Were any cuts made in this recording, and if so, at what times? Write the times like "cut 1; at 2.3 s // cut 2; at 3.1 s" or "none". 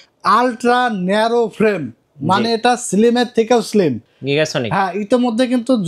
cut 1; at 4.1 s